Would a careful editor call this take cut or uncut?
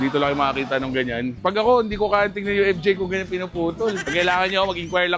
cut